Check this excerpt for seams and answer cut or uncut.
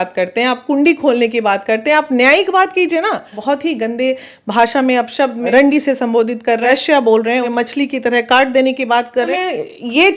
cut